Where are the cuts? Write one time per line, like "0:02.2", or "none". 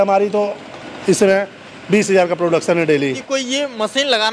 0:03.2